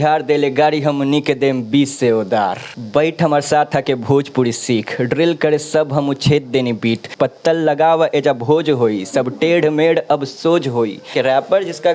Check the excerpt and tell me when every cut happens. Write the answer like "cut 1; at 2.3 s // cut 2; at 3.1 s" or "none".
cut 1; at 2.7 s // cut 2; at 7.1 s // cut 3; at 11.0 s